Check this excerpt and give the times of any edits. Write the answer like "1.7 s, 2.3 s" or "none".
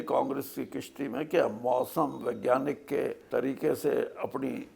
3.2 s